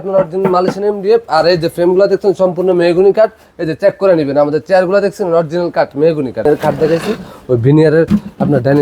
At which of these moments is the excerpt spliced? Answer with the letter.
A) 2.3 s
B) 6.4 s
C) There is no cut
B